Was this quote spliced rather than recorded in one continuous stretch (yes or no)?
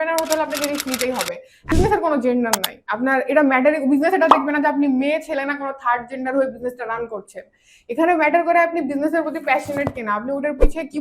yes